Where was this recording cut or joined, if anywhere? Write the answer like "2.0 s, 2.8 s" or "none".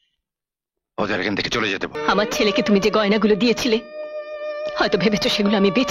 1.9 s